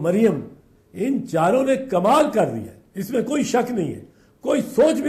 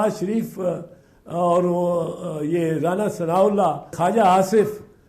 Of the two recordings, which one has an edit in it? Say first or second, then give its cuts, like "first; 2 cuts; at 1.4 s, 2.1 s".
second; 1 cut; at 3.9 s